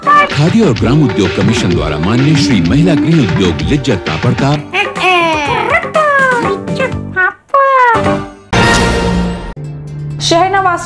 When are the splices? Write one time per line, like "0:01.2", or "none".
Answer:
0:08.4